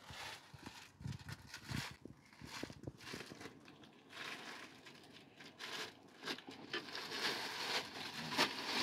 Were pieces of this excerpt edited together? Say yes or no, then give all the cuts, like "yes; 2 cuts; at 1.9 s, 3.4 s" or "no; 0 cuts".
no; 0 cuts